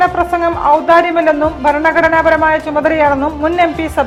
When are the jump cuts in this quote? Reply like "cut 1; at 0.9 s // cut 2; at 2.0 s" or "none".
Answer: none